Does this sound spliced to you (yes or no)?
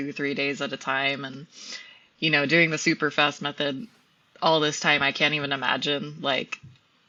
no